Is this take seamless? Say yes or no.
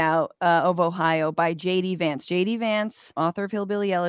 no